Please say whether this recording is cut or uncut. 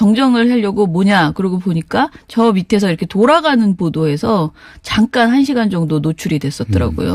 uncut